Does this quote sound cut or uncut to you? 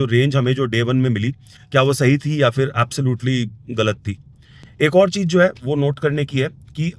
uncut